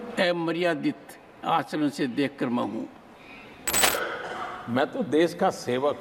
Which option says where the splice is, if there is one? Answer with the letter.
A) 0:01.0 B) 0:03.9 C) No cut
B